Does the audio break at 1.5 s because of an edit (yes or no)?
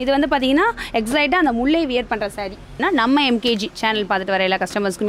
no